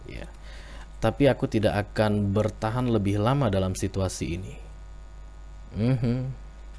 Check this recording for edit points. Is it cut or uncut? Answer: uncut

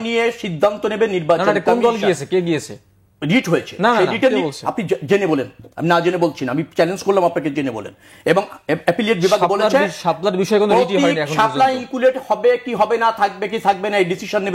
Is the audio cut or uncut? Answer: uncut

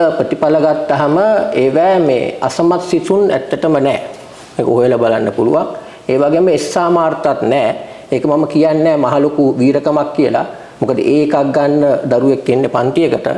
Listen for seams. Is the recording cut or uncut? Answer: uncut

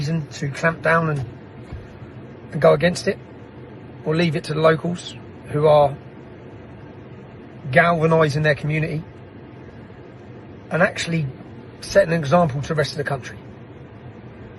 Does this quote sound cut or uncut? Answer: uncut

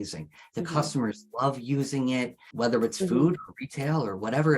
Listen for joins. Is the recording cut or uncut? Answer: cut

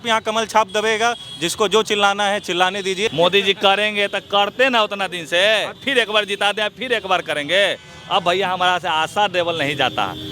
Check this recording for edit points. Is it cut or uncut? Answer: cut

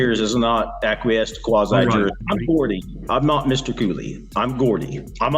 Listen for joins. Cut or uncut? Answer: cut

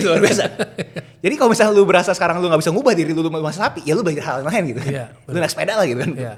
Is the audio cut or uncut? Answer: uncut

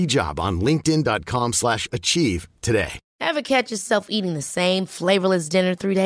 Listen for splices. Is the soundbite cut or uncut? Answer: cut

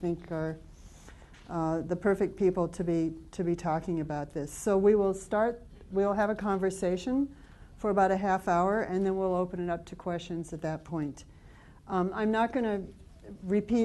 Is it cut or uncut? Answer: cut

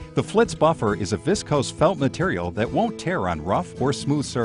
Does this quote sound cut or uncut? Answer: uncut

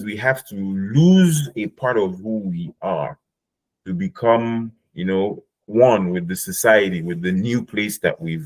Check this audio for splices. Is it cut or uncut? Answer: uncut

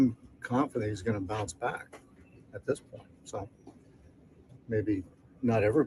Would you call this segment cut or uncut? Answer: cut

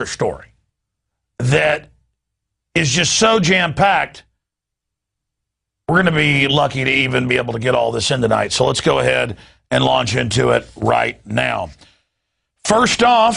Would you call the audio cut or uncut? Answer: cut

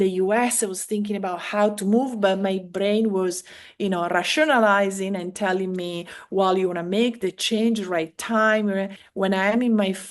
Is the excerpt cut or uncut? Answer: cut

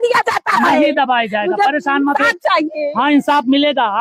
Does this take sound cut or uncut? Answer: uncut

